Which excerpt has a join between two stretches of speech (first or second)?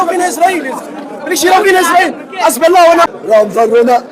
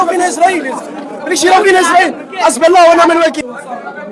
first